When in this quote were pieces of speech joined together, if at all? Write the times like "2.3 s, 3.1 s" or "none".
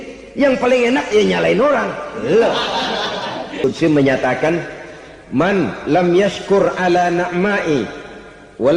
3.6 s